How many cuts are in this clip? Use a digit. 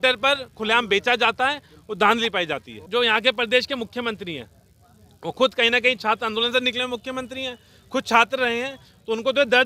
1